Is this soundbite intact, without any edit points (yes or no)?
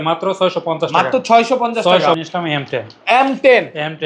no